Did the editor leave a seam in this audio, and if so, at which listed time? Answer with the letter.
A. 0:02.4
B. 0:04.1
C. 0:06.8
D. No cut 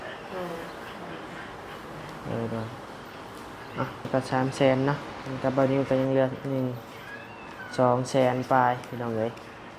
B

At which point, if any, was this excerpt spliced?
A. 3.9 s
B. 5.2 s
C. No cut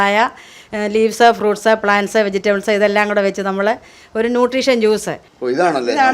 C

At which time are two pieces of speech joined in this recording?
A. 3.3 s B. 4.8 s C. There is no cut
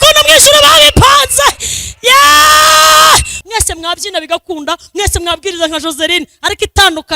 A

